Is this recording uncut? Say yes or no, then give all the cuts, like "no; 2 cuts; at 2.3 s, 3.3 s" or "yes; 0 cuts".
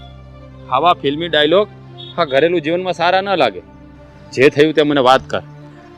yes; 0 cuts